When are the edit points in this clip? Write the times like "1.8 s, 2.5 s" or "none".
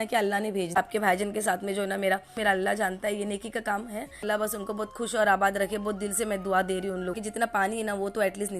0.8 s, 2.4 s, 4.2 s, 7.2 s